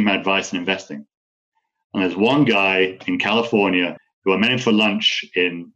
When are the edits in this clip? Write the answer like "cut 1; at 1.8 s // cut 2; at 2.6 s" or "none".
cut 1; at 3.9 s